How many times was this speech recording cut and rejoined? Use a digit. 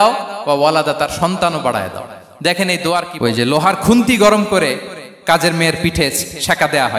1